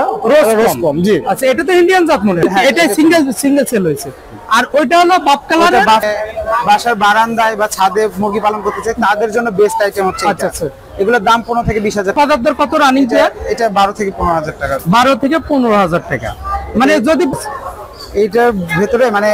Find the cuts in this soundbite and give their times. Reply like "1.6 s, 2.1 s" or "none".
2.4 s, 6.0 s, 12.1 s, 17.3 s